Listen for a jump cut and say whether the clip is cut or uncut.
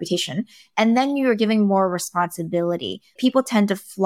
cut